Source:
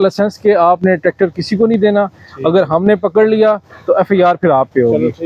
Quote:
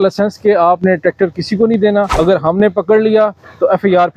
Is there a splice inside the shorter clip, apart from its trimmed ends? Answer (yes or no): yes